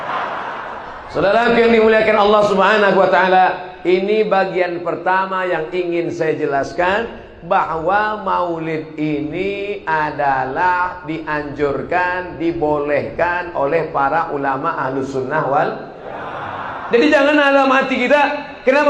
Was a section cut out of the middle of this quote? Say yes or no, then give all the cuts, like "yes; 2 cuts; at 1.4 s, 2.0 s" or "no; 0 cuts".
yes; 1 cut; at 0.9 s